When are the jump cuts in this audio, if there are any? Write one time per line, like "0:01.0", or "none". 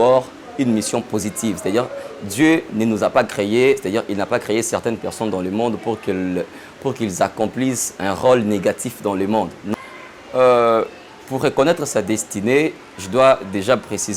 0:09.7